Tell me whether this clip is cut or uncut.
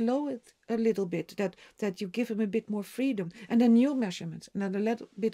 uncut